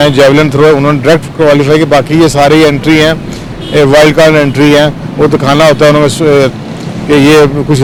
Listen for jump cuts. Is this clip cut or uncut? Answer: uncut